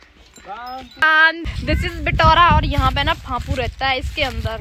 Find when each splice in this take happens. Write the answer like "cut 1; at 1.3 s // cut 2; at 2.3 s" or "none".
cut 1; at 1.4 s